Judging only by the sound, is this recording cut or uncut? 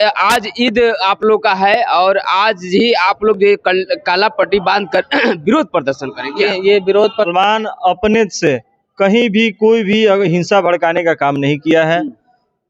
cut